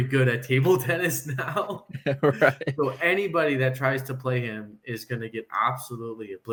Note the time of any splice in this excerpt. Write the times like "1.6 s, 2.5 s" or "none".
none